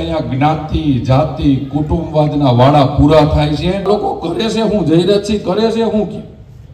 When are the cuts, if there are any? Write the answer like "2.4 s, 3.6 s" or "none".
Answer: 3.9 s